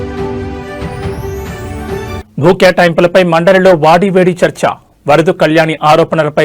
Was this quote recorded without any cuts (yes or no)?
no